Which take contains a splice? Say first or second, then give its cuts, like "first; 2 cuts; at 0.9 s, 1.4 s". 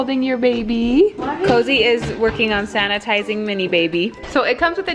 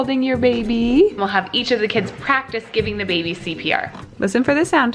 second; 2 cuts; at 1.2 s, 4.0 s